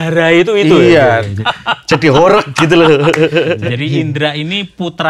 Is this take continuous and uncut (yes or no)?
no